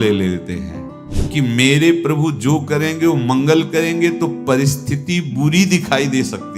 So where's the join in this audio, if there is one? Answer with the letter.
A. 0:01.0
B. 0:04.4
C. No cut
A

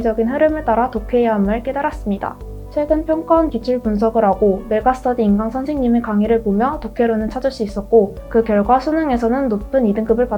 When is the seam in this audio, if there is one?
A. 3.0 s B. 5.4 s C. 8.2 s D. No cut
C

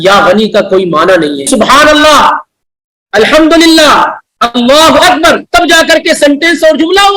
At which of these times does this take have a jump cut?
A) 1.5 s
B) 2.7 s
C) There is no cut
A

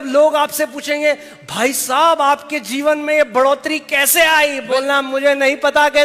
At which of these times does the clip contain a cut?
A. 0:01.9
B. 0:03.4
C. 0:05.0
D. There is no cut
D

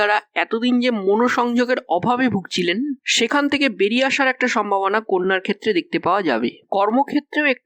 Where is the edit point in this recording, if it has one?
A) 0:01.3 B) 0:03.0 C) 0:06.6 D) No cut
C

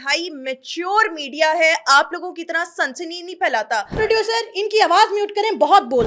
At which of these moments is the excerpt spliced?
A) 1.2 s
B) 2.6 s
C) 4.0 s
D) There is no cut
C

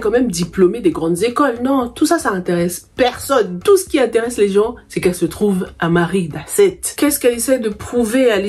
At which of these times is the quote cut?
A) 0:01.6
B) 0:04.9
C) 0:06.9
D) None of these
C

